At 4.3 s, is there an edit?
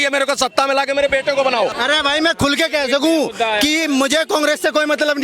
no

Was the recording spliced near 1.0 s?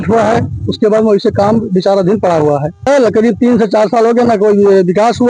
no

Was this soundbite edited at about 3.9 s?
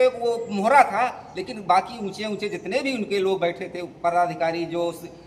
no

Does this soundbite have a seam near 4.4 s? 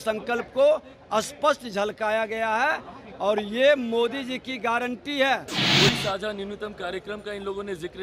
no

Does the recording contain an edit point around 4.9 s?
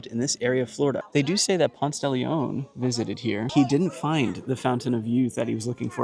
no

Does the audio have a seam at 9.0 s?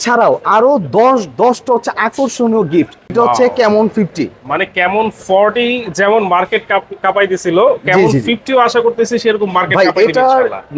no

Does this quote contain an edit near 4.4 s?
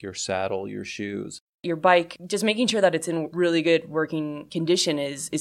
yes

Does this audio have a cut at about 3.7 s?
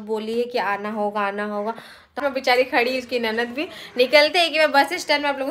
no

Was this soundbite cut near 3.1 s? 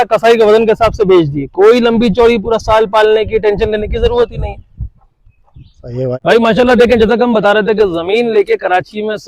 no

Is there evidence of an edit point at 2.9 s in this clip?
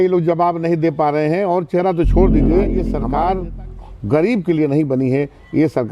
yes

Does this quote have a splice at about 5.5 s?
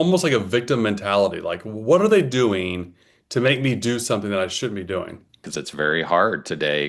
yes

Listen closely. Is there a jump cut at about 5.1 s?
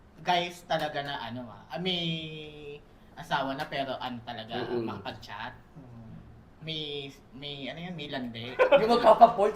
no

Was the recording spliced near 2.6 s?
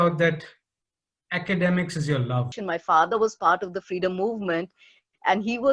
yes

